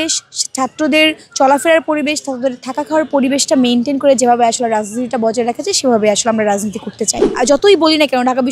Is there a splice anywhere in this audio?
yes; 1 cut; at 7.3 s

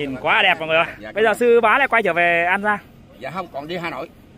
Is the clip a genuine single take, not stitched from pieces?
no; 1 cut; at 1.0 s

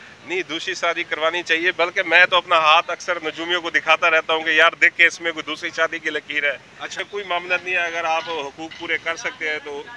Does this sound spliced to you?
yes; 1 cut; at 6.9 s

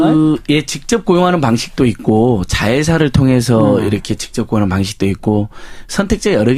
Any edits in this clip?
no; 0 cuts

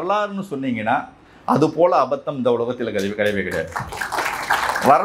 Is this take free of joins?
yes; 0 cuts

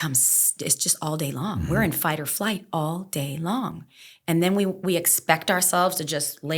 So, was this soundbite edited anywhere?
no; 0 cuts

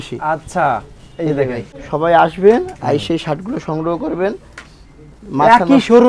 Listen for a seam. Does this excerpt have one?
yes; 1 cut; at 1.7 s

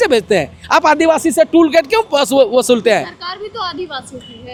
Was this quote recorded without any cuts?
yes; 0 cuts

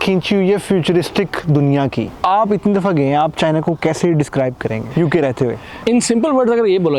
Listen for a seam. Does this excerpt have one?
yes; 3 cuts; at 2.1 s, 4.8 s, 5.7 s

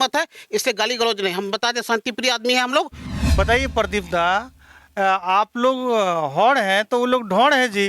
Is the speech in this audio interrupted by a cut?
yes; 1 cut; at 3.0 s

